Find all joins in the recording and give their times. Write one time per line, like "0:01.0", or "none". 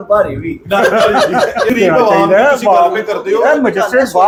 none